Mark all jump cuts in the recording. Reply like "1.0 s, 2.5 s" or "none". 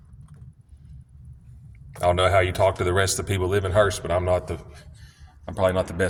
none

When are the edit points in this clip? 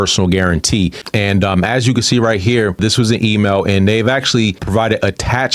1.0 s, 2.8 s, 4.6 s

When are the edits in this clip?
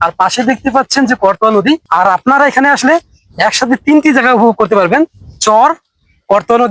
1.9 s

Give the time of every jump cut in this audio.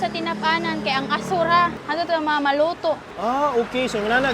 1.8 s, 3.1 s

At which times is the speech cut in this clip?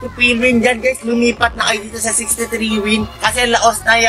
none

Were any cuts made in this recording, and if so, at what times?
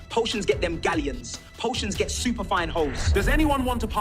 3.0 s

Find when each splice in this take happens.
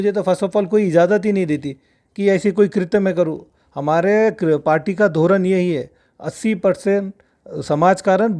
none

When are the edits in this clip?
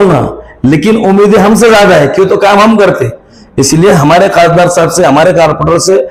none

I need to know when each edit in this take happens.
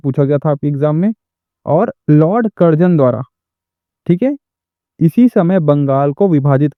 none

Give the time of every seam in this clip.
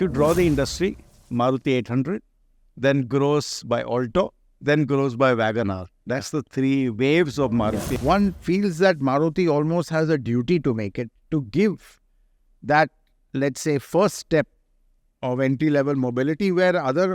7.9 s

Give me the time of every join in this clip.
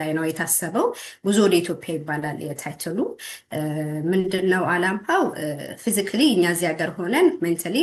none

